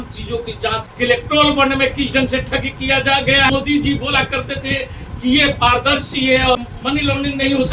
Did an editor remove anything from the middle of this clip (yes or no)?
yes